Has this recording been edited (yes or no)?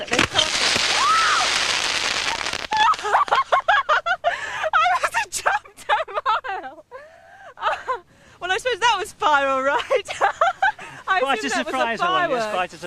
yes